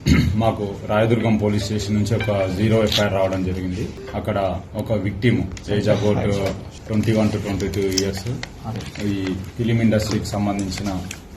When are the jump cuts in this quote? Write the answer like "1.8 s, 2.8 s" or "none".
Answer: 4.0 s, 6.7 s